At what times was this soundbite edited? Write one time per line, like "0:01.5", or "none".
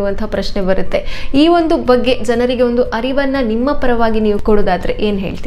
0:04.4

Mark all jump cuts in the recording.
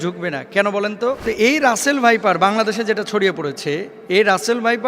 0:01.2
0:03.9

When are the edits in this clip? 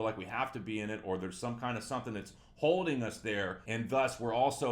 0:03.6

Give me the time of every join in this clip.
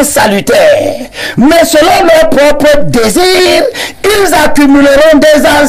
none

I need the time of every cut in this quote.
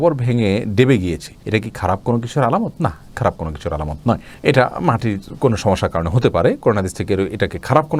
none

